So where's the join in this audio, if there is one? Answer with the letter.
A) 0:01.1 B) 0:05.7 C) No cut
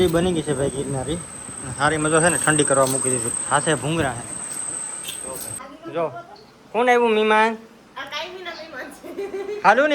B